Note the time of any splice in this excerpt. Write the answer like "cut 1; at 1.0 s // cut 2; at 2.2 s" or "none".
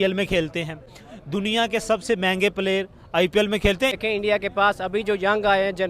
cut 1; at 4.0 s